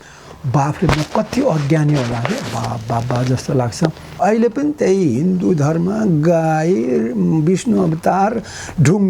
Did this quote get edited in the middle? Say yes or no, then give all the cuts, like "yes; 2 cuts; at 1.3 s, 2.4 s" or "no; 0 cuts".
yes; 1 cut; at 4.1 s